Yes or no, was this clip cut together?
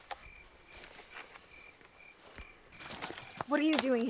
yes